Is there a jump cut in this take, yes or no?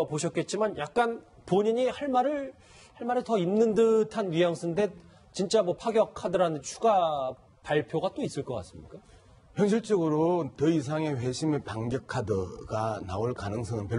yes